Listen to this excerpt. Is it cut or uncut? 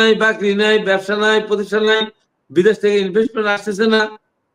uncut